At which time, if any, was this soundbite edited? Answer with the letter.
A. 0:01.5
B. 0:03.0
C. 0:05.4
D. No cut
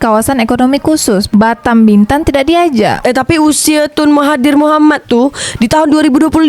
B